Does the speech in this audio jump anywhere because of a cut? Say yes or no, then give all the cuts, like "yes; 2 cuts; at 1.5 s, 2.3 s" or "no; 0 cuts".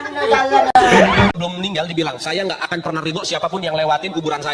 yes; 1 cut; at 1.3 s